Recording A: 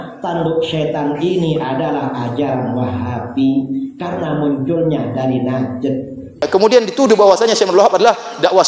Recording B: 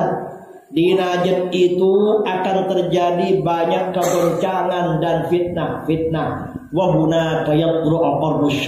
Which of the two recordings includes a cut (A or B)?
A